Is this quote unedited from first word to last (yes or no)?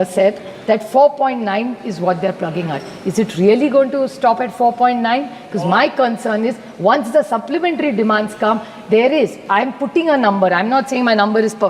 yes